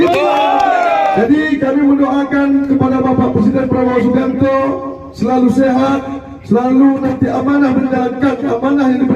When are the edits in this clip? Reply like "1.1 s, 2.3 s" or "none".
1.2 s